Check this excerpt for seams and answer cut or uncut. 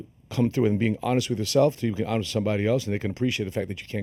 uncut